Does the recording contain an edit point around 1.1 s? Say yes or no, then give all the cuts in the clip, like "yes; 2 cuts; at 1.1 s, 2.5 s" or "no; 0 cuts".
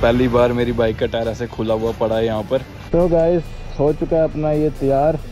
no; 1 cut; at 2.8 s